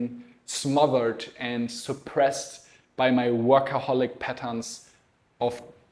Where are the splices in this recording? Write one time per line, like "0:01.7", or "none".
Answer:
none